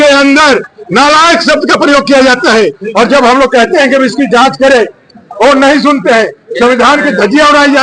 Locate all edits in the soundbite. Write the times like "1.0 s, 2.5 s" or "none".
none